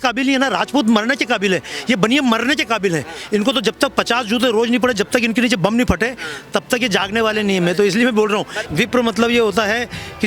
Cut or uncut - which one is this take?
cut